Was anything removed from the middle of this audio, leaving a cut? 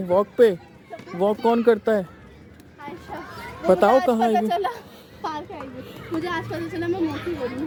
no; 0 cuts

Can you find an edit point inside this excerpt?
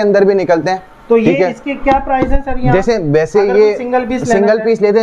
no; 0 cuts

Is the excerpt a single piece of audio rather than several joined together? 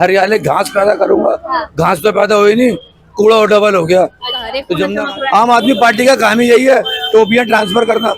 no; 1 cut; at 4.9 s

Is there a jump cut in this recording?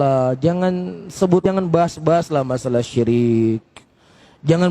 yes; 1 cut; at 1.4 s

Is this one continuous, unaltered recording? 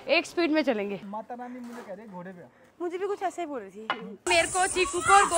no; 2 cuts; at 1.0 s, 4.3 s

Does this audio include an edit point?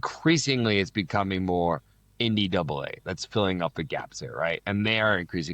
no; 0 cuts

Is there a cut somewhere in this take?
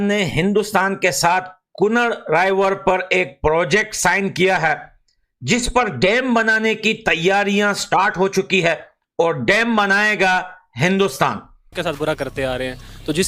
yes; 1 cut; at 11.7 s

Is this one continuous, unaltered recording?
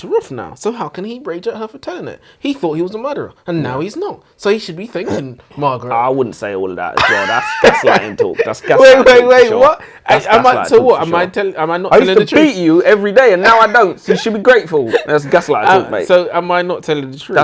yes; 0 cuts

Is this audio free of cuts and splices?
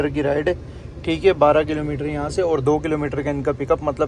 yes; 0 cuts

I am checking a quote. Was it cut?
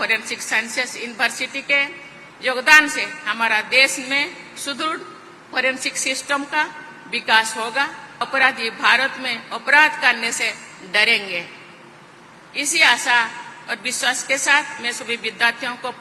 yes; 1 cut; at 8.2 s

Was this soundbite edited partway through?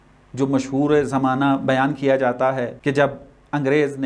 yes; 1 cut; at 2.7 s

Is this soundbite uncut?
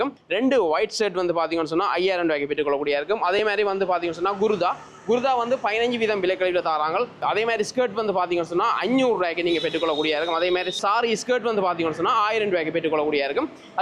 yes; 0 cuts

